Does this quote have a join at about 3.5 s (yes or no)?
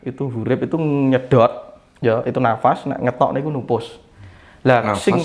no